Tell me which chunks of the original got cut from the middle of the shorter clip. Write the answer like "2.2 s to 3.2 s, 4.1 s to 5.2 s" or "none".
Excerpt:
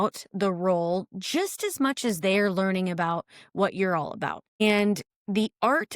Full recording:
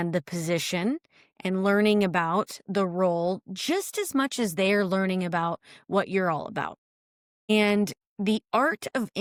6.8 s to 7.4 s